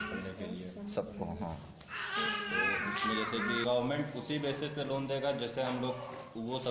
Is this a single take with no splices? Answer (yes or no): no